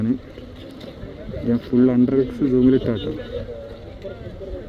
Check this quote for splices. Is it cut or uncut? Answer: uncut